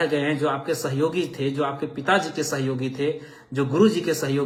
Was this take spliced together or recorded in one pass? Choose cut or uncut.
uncut